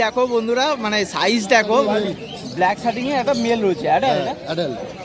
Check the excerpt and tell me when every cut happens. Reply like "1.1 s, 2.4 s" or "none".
2.0 s